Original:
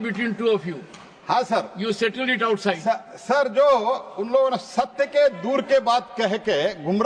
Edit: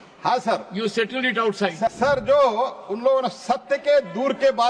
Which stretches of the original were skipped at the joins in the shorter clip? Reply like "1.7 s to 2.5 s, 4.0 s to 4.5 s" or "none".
3.0 s to 3.2 s